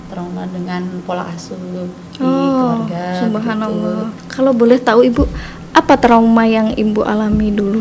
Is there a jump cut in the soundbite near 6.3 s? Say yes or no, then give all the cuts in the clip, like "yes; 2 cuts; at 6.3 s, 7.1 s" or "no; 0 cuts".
no; 1 cut; at 4.2 s